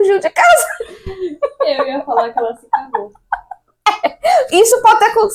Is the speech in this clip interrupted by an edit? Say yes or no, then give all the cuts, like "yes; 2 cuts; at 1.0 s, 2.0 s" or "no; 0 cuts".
no; 0 cuts